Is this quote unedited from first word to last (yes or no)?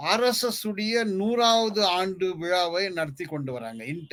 yes